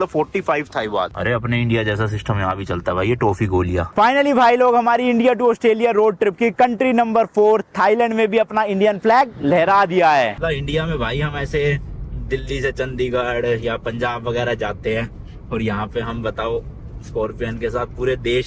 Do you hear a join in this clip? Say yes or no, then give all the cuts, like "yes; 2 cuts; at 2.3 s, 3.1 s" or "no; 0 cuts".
yes; 3 cuts; at 1.1 s, 3.9 s, 10.4 s